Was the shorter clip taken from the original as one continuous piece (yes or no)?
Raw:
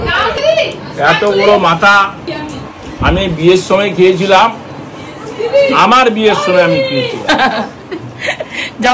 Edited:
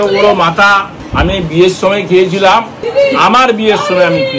no